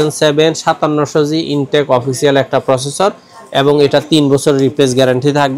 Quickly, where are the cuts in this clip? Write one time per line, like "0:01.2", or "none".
none